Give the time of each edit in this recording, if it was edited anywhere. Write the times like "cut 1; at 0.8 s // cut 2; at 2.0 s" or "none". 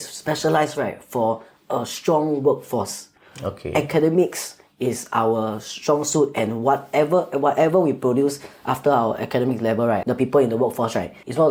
none